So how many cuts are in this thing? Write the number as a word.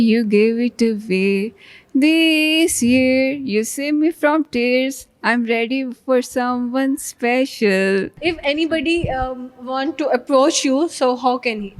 one